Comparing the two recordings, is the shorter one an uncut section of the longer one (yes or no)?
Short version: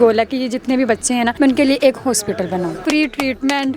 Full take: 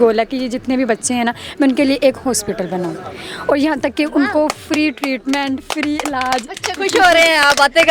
no